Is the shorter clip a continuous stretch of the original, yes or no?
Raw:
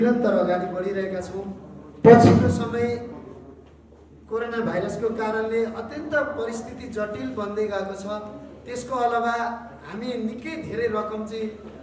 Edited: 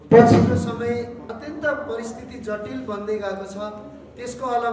no